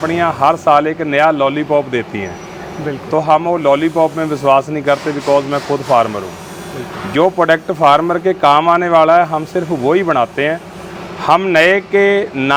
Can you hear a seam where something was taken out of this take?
no; 0 cuts

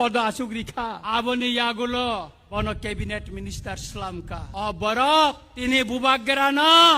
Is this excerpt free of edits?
no; 4 cuts; at 1.0 s, 2.4 s, 4.5 s, 5.5 s

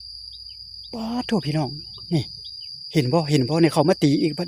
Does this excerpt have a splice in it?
no; 0 cuts

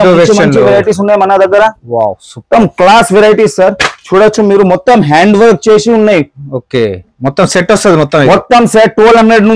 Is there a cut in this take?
no; 0 cuts

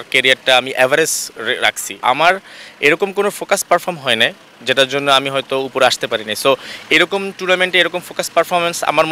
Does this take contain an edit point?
yes; 1 cut; at 2.0 s

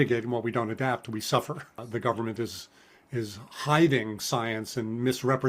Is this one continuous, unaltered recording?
no; 1 cut; at 1.8 s

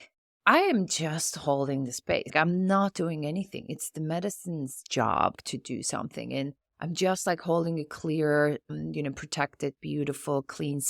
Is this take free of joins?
no; 3 cuts; at 2.3 s, 5.4 s, 8.7 s

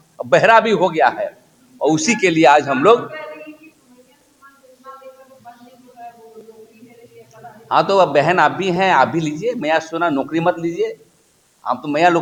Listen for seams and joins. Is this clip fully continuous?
yes; 0 cuts

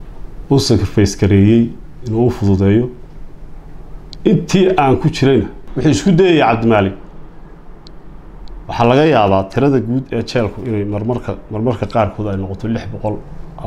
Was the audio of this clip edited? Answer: yes; 1 cut; at 5.6 s

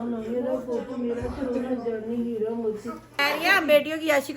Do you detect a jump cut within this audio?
yes; 1 cut; at 3.2 s

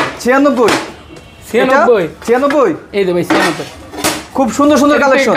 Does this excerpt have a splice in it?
no; 0 cuts

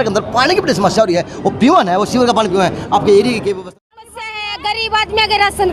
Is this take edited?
yes; 1 cut; at 3.6 s

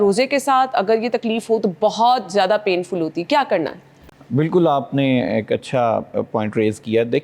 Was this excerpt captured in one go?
yes; 0 cuts

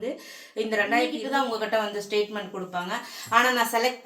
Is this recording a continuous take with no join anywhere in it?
no; 1 cut; at 1.2 s

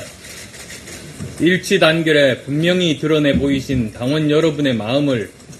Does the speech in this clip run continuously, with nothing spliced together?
no; 1 cut; at 2.8 s

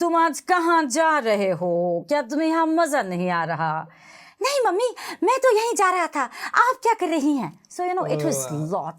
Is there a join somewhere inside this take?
no; 0 cuts

